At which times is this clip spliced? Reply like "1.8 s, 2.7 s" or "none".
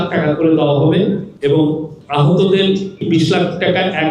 1.3 s, 1.9 s, 3.0 s